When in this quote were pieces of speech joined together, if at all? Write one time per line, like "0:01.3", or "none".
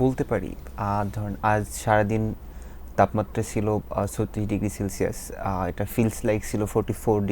none